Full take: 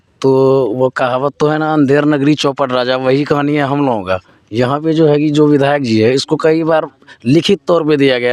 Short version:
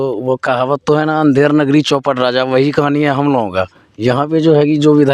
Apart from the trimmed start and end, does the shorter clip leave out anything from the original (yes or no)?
no